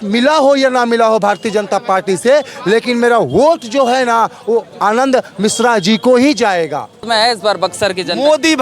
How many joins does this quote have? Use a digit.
1